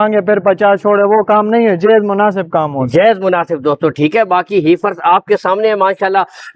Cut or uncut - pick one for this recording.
uncut